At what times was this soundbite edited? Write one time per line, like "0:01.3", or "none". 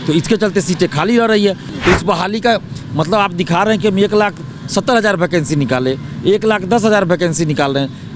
0:01.7

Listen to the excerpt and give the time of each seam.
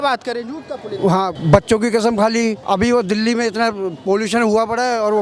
0:01.4
0:02.6

